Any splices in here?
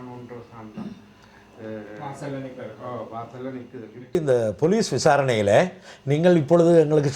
yes; 1 cut; at 4.1 s

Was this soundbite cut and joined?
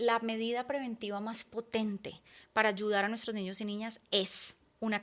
no; 0 cuts

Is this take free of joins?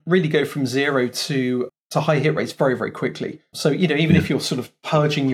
no; 2 cuts; at 1.7 s, 3.5 s

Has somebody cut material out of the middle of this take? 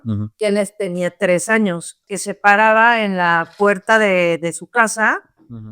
yes; 1 cut; at 2.1 s

